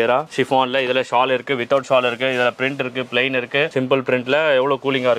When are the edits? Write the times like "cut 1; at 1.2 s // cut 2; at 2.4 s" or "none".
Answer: cut 1; at 3.7 s